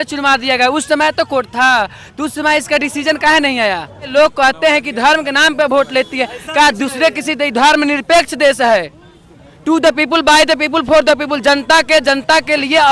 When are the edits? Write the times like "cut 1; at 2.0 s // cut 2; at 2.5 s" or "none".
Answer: cut 1; at 4.1 s

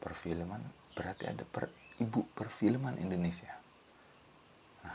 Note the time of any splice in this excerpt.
none

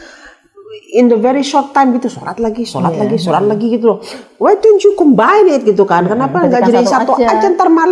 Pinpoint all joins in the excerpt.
none

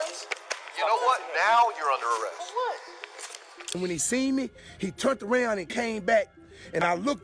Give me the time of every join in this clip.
cut 1; at 3.8 s

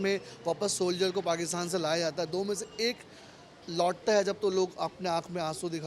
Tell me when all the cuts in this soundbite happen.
none

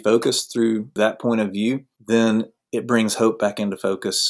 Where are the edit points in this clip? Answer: cut 1; at 0.9 s // cut 2; at 1.9 s

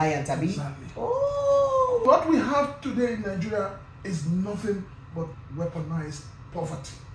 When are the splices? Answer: cut 1; at 2.0 s

